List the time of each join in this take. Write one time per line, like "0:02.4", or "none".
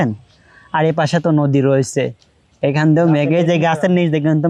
none